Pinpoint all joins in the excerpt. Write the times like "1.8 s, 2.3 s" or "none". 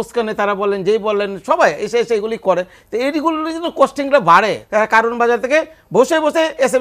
4.6 s